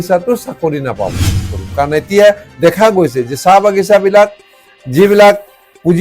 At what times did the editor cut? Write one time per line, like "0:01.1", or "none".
0:01.5